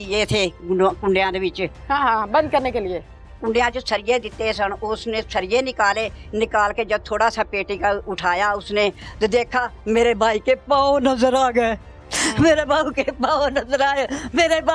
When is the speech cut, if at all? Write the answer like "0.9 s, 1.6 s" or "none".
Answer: none